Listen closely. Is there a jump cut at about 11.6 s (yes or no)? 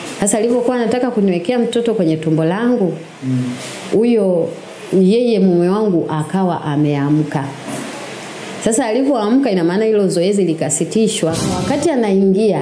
yes